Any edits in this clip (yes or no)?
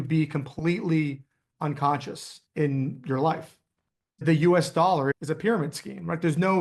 yes